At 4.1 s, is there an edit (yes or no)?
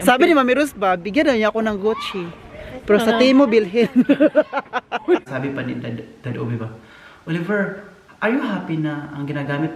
no